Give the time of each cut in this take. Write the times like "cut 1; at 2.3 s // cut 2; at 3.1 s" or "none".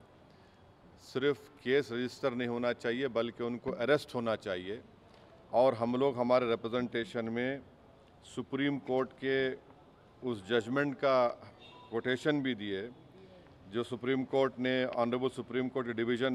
none